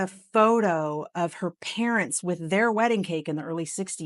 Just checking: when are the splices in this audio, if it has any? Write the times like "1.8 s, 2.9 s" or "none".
none